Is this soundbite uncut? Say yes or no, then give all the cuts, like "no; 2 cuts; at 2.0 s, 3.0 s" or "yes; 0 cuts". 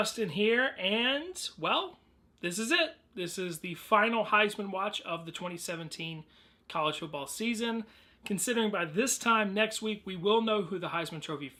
yes; 0 cuts